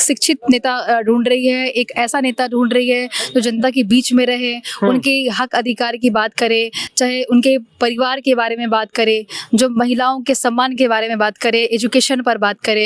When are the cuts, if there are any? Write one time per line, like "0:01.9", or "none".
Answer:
none